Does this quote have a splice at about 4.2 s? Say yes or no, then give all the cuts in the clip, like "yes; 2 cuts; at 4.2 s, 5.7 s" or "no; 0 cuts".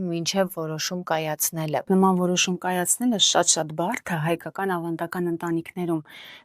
no; 1 cut; at 1.9 s